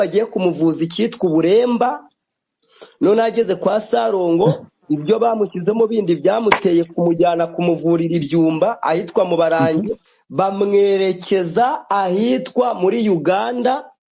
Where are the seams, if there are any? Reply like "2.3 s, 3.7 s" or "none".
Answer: 10.0 s

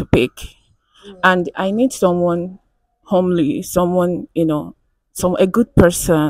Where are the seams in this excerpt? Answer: none

